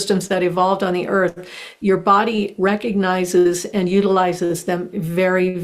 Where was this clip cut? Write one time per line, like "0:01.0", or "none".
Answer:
none